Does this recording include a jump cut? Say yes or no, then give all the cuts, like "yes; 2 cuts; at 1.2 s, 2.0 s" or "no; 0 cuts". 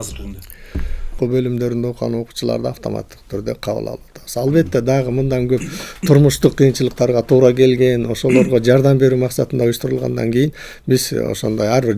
yes; 1 cut; at 1.2 s